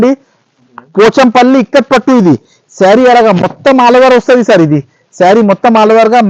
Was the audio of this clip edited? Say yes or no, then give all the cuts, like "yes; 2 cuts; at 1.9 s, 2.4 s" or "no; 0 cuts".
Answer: no; 0 cuts